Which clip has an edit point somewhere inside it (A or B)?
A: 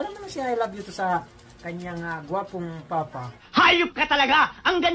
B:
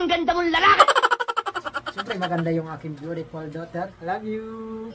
B